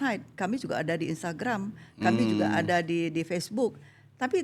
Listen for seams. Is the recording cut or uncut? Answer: uncut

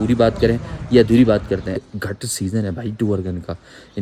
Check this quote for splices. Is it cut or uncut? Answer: cut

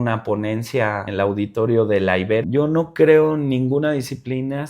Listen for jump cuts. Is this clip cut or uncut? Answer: cut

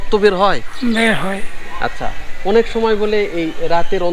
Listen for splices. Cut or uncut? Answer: uncut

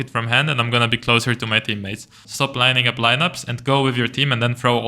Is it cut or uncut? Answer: cut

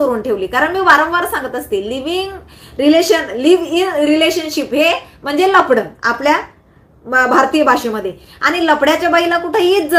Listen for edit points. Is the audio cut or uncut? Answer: uncut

